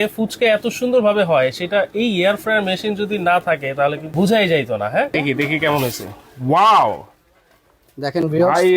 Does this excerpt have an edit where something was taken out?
yes; 2 cuts; at 4.0 s, 5.1 s

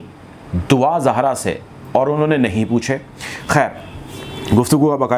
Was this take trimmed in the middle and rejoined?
no; 0 cuts

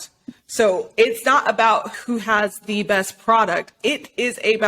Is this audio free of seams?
no; 2 cuts; at 1.9 s, 3.9 s

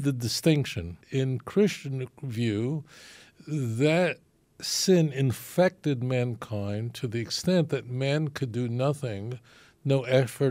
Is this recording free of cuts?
no; 1 cut; at 1.0 s

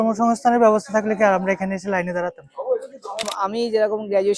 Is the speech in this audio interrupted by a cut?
yes; 1 cut; at 3.2 s

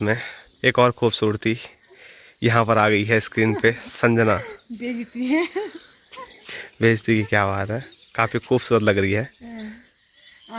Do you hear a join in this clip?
no; 0 cuts

